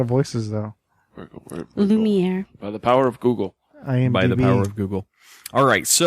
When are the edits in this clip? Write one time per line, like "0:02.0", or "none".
0:01.7